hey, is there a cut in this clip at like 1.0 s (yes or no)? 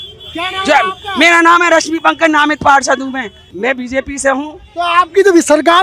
no